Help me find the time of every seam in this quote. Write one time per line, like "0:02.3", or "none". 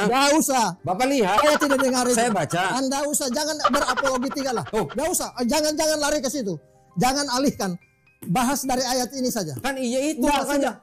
none